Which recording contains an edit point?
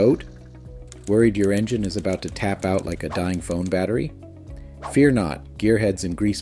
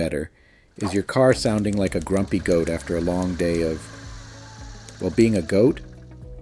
first; 1 cut; at 5.4 s

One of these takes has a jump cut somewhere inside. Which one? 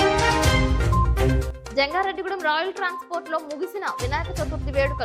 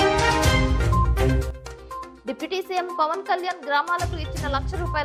first; 1 cut; at 1.5 s

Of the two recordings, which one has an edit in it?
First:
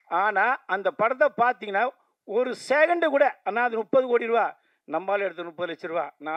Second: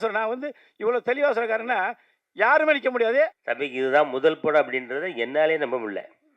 second; 1 cut; at 3.4 s

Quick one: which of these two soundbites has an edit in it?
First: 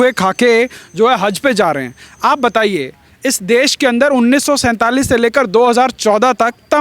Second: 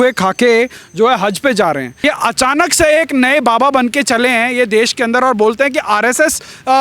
second; 1 cut; at 1.9 s

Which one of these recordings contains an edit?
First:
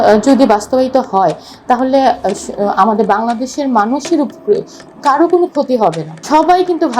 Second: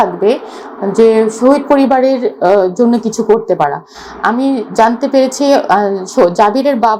first; 1 cut; at 6.1 s

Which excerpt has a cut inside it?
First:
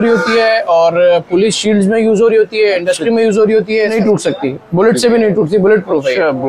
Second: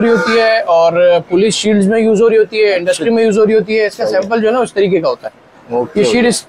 first; 1 cut; at 3.9 s

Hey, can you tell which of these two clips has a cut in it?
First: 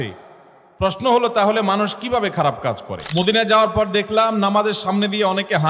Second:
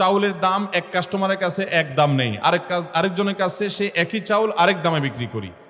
first; 1 cut; at 2.9 s

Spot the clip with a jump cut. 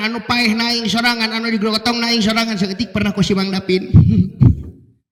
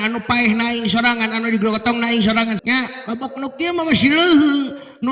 second; 1 cut; at 2.6 s

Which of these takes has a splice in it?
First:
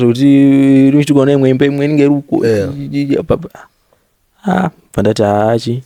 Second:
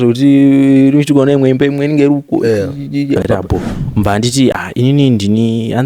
second; 1 cut; at 3.2 s

